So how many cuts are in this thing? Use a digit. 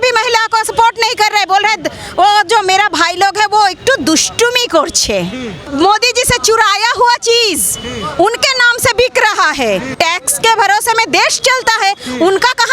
2